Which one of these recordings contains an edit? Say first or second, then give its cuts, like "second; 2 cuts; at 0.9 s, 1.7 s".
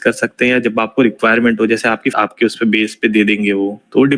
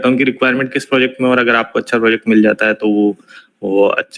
first; 1 cut; at 2.1 s